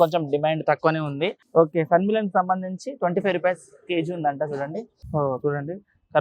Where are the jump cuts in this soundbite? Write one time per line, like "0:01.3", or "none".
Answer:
0:01.4
0:05.0